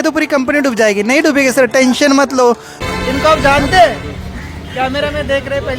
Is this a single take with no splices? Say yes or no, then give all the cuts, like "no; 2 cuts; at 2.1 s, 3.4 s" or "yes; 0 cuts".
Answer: no; 1 cut; at 2.8 s